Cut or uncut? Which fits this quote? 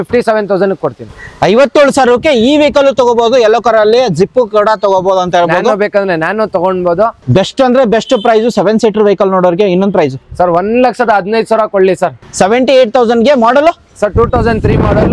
cut